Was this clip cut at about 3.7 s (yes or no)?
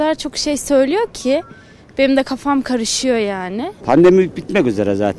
yes